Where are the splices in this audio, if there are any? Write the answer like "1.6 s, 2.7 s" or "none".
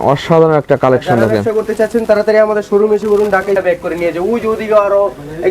3.6 s